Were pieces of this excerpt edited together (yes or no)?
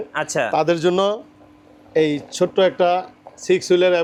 no